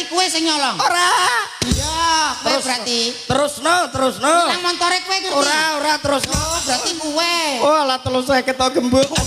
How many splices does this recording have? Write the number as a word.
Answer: zero